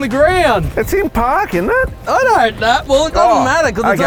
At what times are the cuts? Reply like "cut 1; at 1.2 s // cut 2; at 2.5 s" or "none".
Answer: none